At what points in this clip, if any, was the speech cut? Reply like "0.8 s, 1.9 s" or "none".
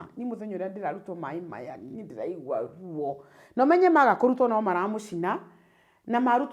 none

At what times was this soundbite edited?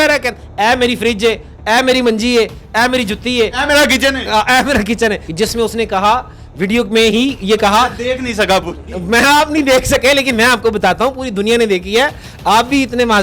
5.2 s

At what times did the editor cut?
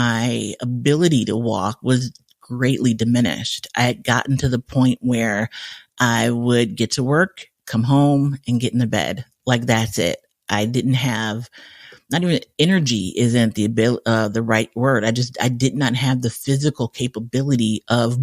none

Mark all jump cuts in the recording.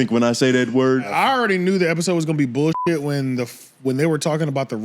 1.1 s

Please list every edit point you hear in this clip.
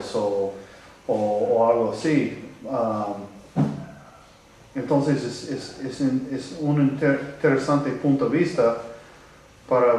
2.5 s

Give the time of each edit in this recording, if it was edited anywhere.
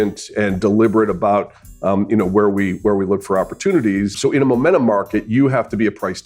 4.2 s

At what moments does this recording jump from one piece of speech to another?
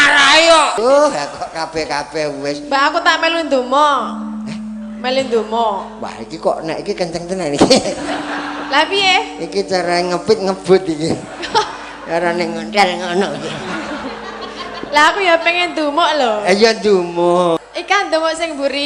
0.8 s, 17.6 s

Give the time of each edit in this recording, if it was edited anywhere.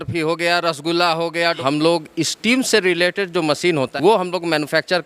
1.6 s, 3.9 s

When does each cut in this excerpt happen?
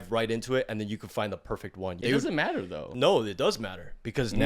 2.0 s, 2.8 s

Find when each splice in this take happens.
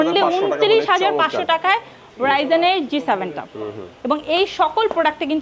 3.8 s

